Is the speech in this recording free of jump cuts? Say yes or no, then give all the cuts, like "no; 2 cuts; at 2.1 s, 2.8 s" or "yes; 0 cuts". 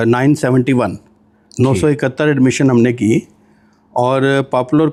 yes; 0 cuts